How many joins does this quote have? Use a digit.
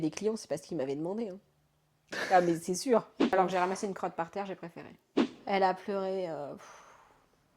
2